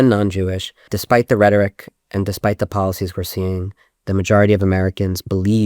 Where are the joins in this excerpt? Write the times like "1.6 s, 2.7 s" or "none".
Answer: 0.9 s